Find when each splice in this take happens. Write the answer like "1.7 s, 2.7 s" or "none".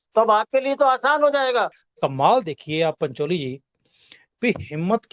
1.8 s

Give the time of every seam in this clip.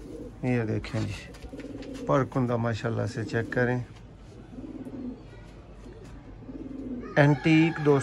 none

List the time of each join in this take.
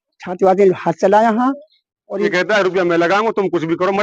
2.3 s

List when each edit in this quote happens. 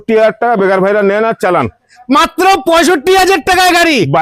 none

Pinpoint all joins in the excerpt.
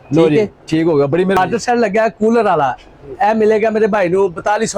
1.4 s

